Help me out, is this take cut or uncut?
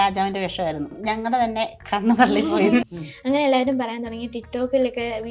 cut